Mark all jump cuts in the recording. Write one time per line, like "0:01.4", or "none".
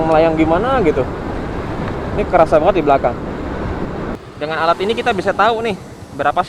0:04.2